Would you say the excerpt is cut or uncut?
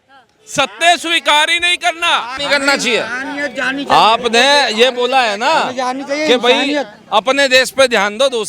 cut